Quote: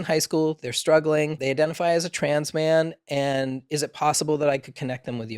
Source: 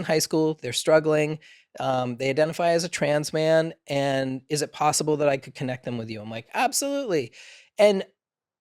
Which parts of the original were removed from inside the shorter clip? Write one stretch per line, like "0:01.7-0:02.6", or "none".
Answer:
0:01.4-0:02.2